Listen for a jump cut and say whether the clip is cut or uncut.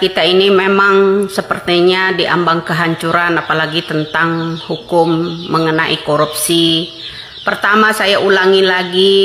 uncut